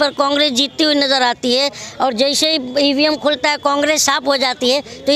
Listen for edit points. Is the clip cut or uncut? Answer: uncut